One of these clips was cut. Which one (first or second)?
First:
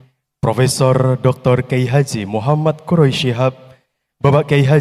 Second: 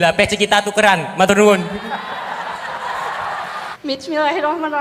second